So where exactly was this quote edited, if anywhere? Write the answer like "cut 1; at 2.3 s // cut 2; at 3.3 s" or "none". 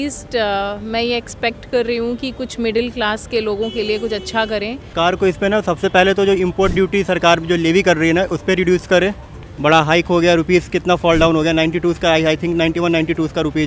cut 1; at 4.9 s // cut 2; at 9.3 s